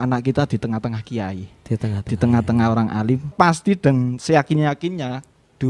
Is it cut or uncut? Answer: cut